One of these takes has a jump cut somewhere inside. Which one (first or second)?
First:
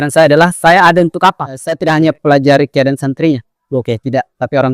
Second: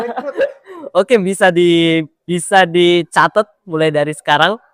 first